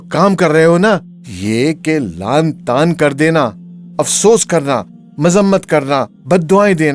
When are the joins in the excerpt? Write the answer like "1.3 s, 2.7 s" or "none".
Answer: none